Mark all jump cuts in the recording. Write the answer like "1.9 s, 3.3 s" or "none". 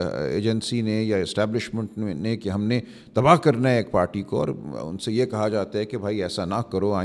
none